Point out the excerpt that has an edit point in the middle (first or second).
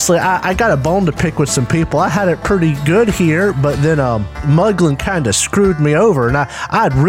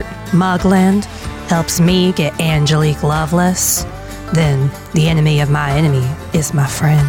first